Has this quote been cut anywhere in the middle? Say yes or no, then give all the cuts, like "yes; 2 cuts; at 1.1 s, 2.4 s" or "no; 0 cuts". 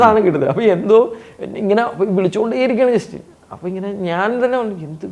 no; 0 cuts